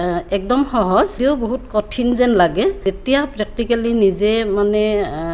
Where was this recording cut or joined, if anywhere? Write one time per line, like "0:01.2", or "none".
0:01.2
0:02.8

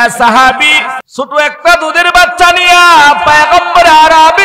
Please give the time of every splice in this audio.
0:01.0

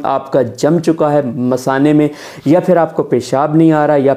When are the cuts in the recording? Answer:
none

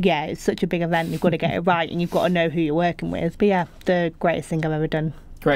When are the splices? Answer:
0:03.3

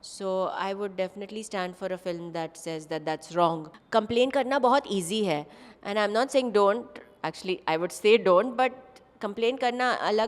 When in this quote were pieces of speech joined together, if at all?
0:03.7

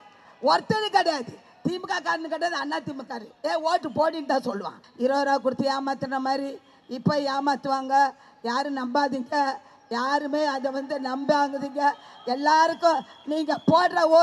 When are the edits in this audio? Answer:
0:04.8

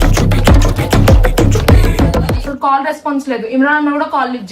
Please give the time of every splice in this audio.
0:02.5

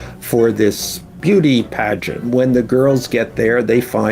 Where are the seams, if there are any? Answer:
0:01.1
0:02.3

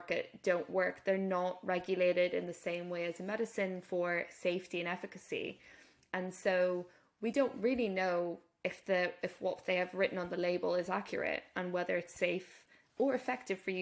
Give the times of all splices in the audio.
none

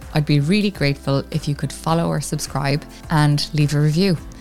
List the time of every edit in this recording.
0:02.9

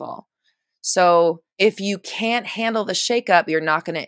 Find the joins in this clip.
0:01.5

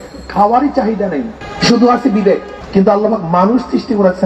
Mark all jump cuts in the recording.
0:01.4
0:02.5

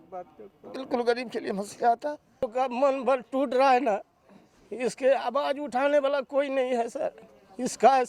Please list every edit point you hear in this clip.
0:02.5

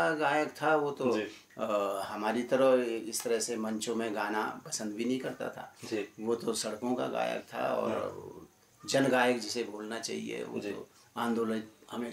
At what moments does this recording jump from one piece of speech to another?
none

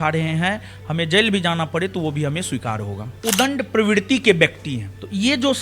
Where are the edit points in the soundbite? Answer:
0:03.2

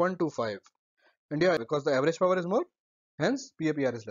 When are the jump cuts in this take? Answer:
0:01.6

